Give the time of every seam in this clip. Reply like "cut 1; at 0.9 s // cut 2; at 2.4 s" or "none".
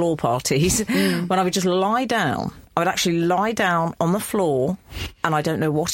none